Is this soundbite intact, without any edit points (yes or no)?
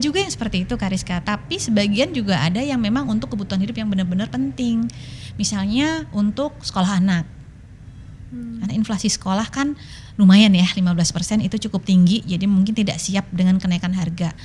yes